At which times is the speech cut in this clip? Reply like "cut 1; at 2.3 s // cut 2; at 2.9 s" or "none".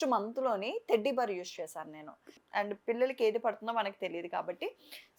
cut 1; at 2.4 s